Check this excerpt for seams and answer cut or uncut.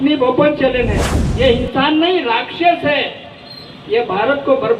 cut